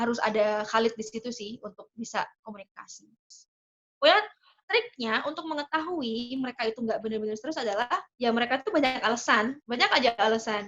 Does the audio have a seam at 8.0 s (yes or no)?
no